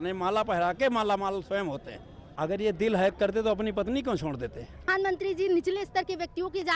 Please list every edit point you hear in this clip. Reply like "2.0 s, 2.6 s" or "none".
2.2 s, 4.9 s